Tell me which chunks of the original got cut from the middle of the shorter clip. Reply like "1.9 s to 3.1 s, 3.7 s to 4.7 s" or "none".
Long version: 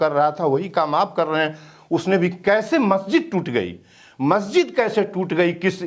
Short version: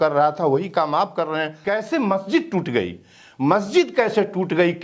1.6 s to 2.4 s